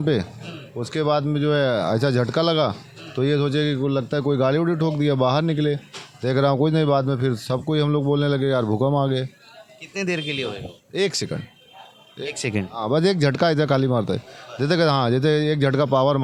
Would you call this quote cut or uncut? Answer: uncut